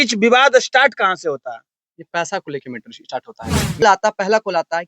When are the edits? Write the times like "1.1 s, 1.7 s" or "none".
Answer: 3.8 s

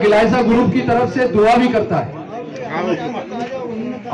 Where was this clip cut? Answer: none

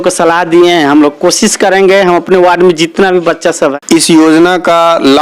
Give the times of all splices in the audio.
3.7 s

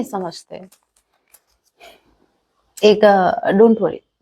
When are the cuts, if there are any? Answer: none

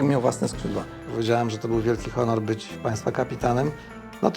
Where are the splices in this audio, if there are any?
1.0 s, 2.7 s

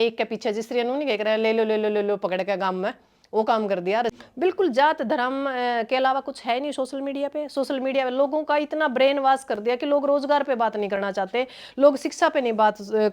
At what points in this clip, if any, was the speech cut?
4.2 s

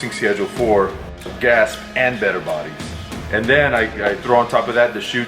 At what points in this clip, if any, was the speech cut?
1.3 s, 3.1 s

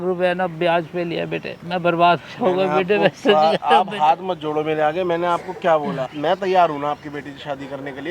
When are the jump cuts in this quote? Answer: 1.5 s, 6.1 s

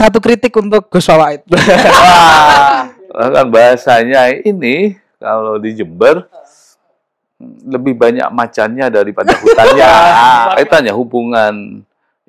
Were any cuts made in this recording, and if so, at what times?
2.6 s, 10.5 s

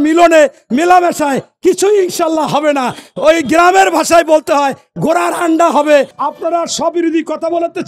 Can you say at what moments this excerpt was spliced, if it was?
6.2 s

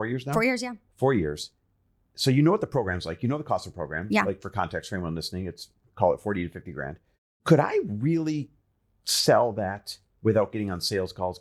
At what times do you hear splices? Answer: none

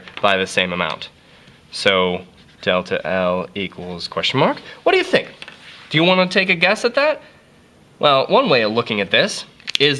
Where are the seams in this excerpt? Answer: none

